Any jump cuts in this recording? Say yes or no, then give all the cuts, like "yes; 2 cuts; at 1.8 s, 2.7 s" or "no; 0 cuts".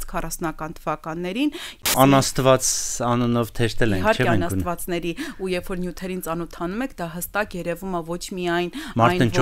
yes; 1 cut; at 1.9 s